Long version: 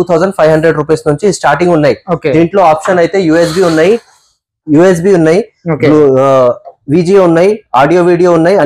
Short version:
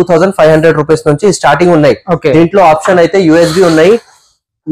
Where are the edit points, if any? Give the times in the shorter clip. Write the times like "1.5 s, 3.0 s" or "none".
none